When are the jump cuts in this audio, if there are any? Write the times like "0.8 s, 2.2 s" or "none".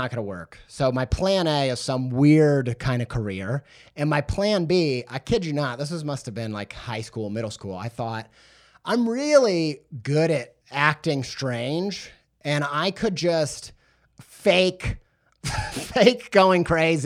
10.6 s

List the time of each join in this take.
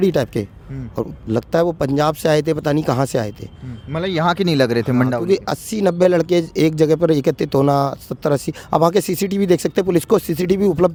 none

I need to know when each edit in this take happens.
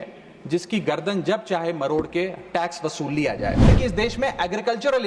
3.7 s

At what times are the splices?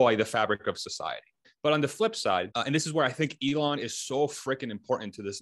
1.5 s, 2.5 s

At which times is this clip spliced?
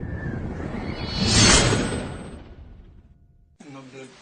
2.0 s

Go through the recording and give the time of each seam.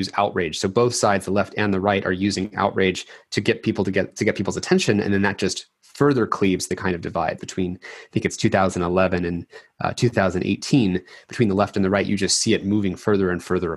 7.4 s

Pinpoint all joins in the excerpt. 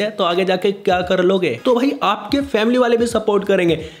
1.6 s

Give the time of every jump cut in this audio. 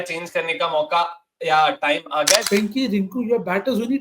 2.4 s

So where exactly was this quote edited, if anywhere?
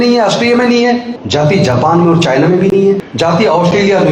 1.2 s, 3.1 s

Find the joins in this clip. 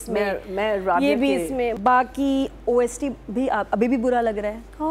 1.8 s

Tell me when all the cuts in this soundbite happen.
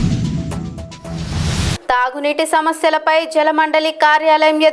1.8 s

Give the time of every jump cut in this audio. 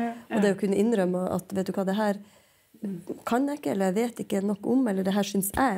none

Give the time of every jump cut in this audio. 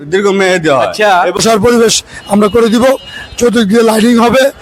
1.4 s

